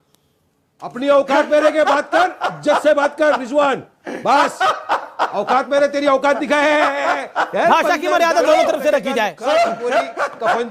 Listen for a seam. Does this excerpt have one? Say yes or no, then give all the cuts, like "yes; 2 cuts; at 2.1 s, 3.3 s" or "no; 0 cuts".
no; 0 cuts